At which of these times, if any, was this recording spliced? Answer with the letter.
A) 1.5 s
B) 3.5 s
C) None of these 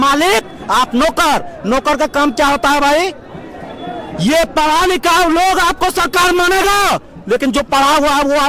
C